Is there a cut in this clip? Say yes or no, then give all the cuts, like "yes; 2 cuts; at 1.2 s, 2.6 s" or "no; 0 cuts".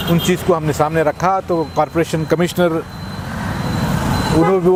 no; 0 cuts